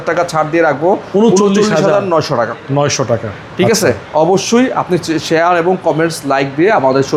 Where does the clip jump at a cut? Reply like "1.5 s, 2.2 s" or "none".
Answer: none